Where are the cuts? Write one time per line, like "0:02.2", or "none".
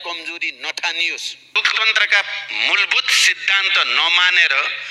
0:01.6